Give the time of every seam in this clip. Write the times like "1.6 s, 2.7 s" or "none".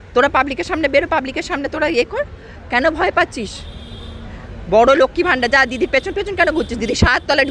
none